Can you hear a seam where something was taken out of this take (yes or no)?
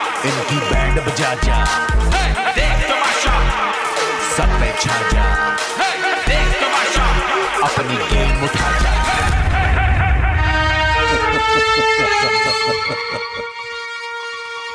no